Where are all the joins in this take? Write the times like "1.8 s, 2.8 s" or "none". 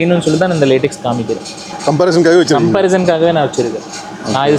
none